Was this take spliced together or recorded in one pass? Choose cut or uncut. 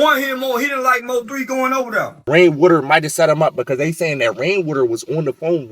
cut